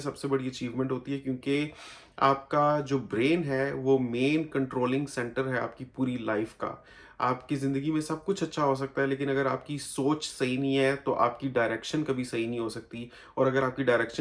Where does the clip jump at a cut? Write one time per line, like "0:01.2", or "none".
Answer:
none